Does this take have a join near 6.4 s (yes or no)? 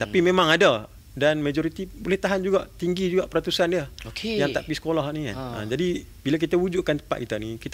no